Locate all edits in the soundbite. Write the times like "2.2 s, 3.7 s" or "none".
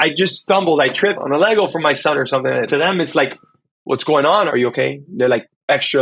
1.2 s, 2.7 s, 4.5 s